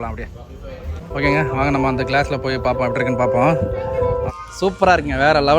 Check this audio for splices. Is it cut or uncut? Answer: cut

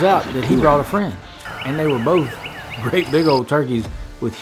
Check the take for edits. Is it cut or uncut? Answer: uncut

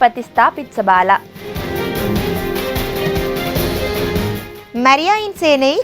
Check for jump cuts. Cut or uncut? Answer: cut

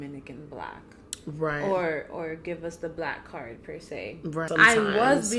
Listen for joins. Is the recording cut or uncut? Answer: cut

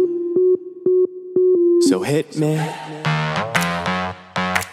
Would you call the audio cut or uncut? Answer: cut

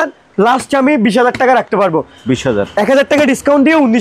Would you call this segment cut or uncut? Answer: uncut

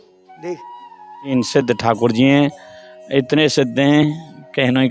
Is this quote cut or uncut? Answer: cut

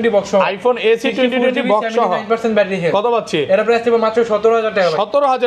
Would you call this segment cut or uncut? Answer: uncut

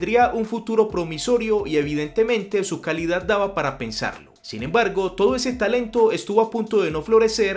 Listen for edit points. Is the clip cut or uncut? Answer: uncut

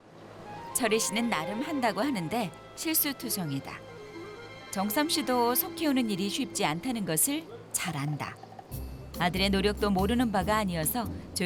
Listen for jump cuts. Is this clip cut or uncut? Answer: uncut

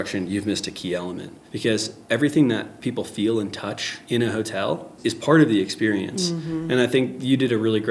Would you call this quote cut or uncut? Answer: uncut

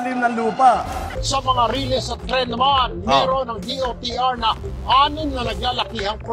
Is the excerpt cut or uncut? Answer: cut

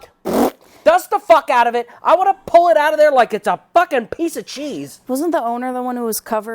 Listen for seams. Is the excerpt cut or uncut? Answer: uncut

